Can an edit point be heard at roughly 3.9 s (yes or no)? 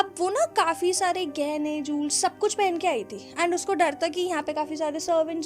no